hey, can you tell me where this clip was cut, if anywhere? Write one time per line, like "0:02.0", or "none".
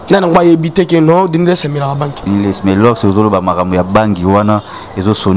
0:02.2

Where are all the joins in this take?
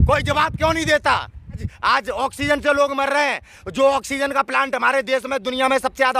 0:01.6

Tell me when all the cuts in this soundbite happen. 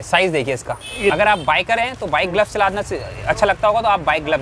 0:01.1

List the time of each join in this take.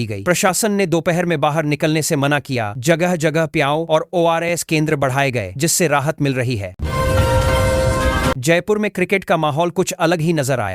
0:06.7
0:08.3

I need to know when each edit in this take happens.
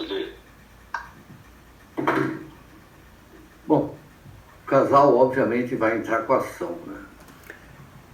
none

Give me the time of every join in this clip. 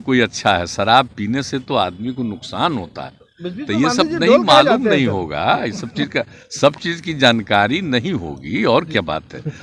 none

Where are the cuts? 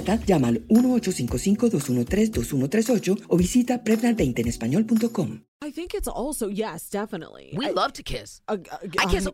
0:05.4

